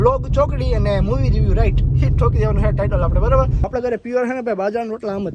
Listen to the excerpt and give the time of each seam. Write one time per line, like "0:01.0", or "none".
0:03.7